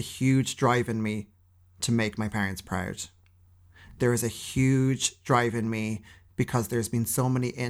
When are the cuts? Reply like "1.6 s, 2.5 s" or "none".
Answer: none